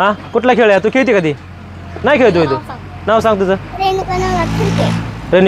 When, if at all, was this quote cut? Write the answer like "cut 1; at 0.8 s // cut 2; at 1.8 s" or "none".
none